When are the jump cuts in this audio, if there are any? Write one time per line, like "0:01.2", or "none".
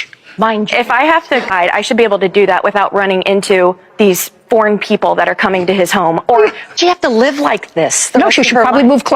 0:01.5
0:06.8